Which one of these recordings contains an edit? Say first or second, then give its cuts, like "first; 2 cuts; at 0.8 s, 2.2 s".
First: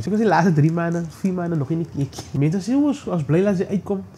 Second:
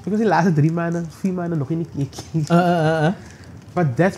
first; 1 cut; at 2.3 s